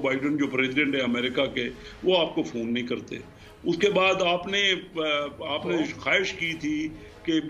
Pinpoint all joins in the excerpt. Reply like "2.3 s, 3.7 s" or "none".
none

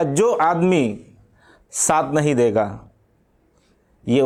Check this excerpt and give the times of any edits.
none

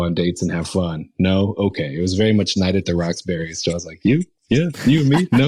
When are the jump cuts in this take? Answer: none

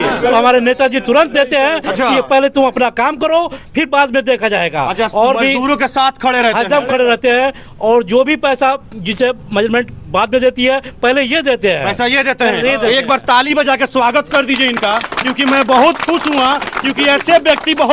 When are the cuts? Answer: none

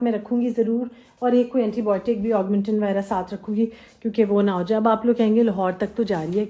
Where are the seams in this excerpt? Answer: none

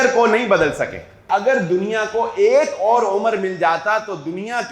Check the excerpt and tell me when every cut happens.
1.3 s

